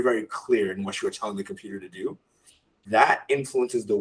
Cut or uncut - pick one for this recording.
uncut